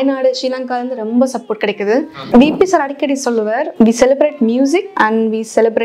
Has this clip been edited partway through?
yes; 3 cuts; at 2.2 s, 3.7 s, 4.9 s

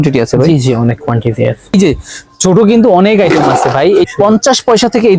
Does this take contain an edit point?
yes; 2 cuts; at 1.7 s, 4.1 s

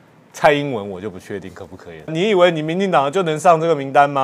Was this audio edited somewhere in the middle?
yes; 1 cut; at 2.1 s

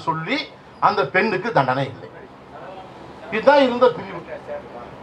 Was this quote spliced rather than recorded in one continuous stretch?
no; 0 cuts

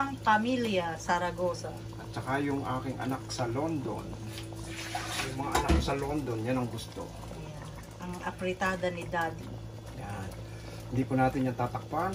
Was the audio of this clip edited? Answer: no; 0 cuts

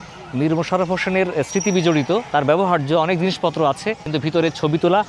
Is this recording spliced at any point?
yes; 1 cut; at 4.1 s

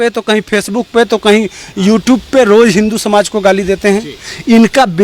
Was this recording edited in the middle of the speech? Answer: no; 0 cuts

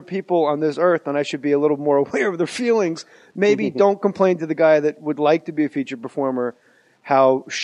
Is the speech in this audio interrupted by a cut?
yes; 1 cut; at 5.3 s

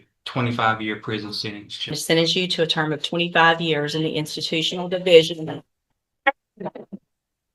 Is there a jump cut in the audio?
yes; 1 cut; at 2.0 s

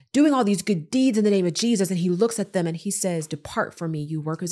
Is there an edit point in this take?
no; 0 cuts

